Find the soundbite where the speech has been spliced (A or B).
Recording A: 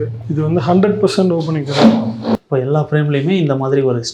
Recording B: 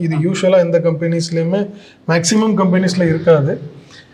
A